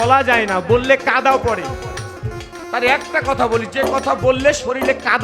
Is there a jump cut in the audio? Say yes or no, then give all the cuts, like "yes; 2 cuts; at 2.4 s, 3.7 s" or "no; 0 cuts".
yes; 1 cut; at 2.1 s